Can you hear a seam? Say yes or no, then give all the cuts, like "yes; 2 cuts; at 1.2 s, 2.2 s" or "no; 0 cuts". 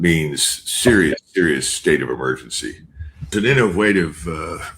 yes; 1 cut; at 3.3 s